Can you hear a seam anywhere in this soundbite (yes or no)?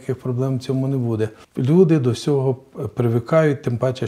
yes